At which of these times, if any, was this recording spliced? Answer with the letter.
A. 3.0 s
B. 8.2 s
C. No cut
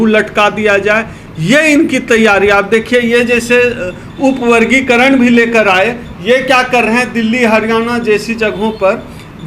C